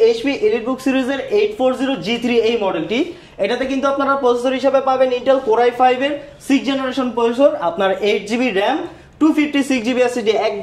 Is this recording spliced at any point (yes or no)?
no